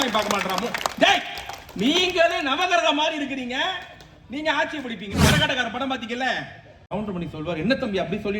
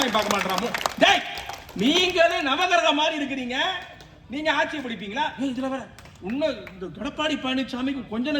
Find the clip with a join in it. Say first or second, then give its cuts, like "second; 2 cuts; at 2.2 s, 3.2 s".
first; 2 cuts; at 5.1 s, 6.9 s